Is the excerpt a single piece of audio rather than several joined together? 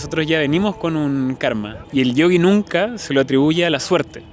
no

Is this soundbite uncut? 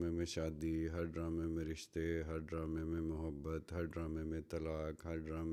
yes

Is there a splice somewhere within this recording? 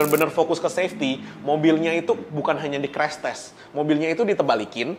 no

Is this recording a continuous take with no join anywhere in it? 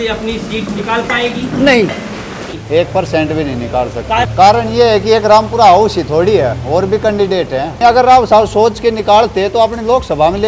no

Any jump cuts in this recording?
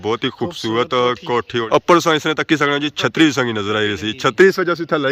yes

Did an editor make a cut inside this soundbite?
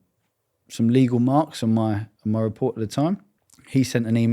yes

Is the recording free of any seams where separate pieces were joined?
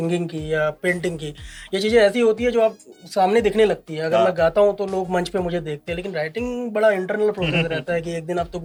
yes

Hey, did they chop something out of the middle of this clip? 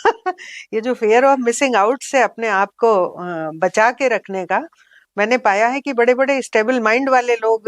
no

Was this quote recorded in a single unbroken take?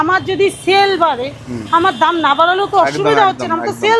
yes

